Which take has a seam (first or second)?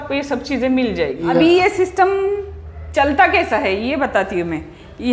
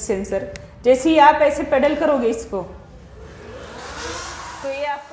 first